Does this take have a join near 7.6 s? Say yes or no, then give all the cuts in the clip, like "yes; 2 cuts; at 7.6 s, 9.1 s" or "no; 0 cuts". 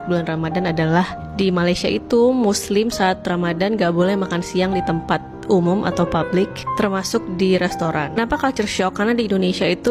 no; 0 cuts